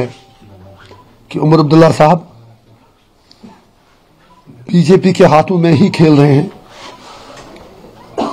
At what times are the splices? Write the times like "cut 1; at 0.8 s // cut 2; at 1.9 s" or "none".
none